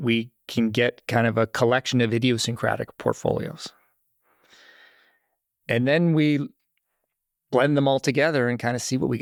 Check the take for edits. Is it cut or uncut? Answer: uncut